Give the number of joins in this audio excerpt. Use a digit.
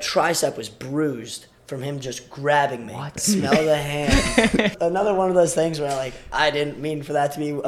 2